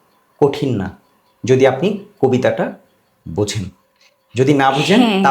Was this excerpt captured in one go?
yes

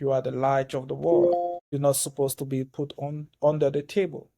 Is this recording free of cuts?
no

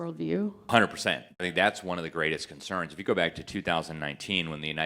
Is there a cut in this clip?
yes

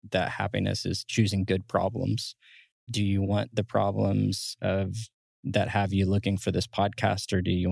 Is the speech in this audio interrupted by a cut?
yes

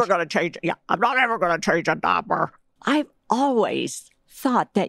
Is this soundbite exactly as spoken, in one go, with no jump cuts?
no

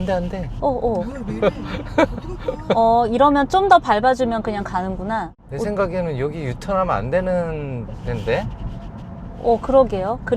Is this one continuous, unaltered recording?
no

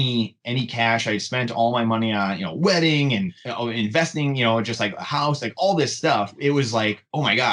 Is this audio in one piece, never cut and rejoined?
no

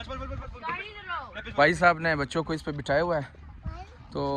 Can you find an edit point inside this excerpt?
no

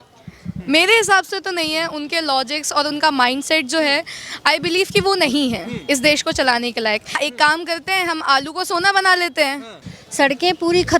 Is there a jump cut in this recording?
yes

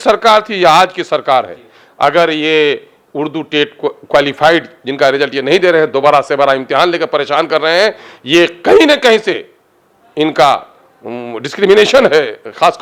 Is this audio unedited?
yes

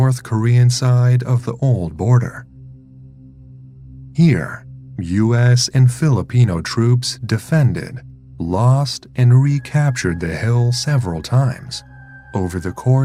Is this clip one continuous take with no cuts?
yes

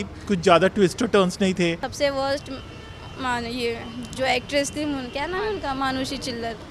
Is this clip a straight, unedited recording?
no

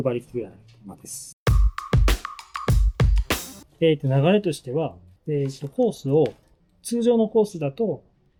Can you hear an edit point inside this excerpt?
no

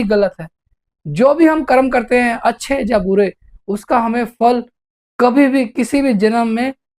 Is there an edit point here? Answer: no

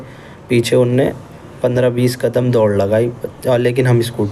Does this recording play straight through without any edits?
yes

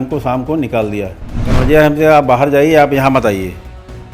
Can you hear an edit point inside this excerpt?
yes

